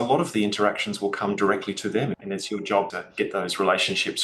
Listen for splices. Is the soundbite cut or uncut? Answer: cut